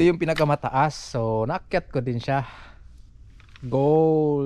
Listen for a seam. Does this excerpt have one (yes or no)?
no